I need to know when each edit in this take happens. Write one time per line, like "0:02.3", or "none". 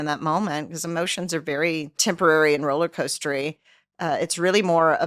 0:02.0

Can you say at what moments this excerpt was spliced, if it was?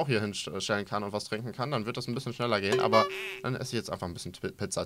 none

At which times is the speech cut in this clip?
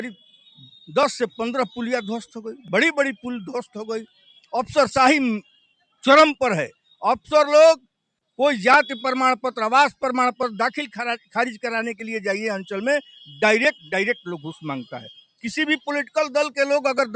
none

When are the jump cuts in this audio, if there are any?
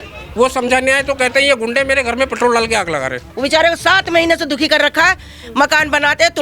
0:03.2

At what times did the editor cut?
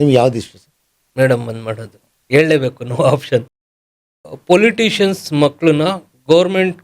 0:03.8

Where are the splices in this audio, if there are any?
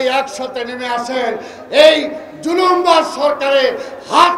none

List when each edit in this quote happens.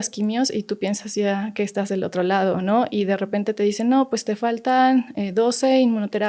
none

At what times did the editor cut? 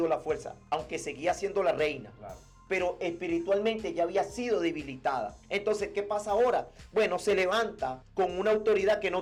none

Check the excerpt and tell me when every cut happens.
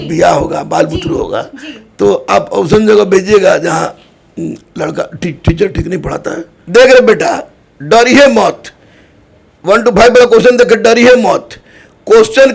0:06.5

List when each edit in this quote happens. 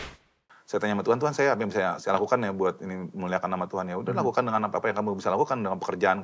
none

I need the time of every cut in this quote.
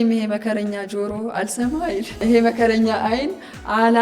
0:02.1

